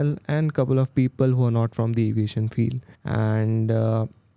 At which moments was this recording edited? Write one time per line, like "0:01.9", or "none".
0:02.9

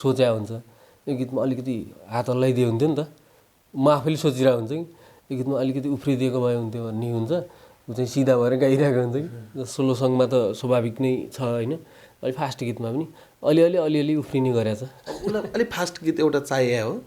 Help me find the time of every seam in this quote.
none

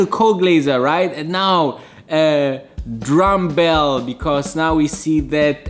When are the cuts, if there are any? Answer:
none

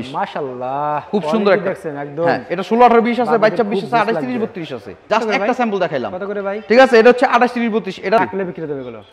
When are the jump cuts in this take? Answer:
0:04.9
0:08.2

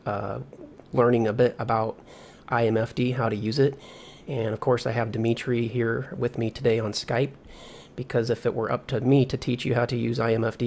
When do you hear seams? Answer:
none

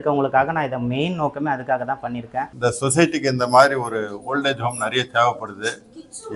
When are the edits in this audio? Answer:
0:02.5

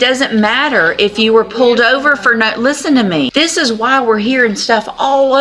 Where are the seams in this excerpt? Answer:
0:03.3

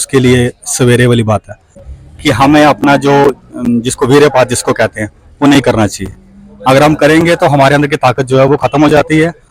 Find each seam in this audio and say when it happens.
0:01.8

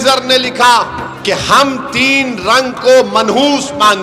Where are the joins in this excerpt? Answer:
0:01.1

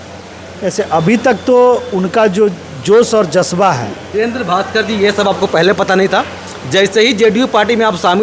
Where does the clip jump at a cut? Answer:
0:04.1

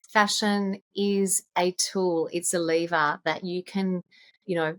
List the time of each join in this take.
none

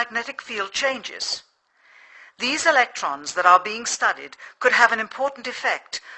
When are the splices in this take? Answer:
none

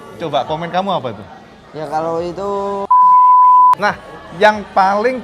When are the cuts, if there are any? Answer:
0:02.8
0:03.8

